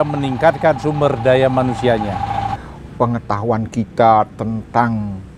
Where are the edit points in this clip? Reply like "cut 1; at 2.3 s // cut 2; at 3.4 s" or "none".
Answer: cut 1; at 2.6 s

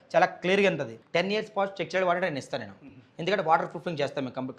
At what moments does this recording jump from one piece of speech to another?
cut 1; at 0.9 s

